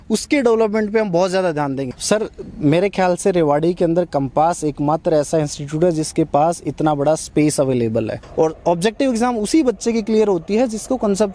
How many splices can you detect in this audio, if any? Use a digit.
2